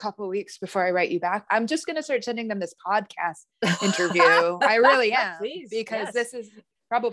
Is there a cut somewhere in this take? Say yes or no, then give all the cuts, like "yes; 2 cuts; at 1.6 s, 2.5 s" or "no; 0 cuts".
no; 0 cuts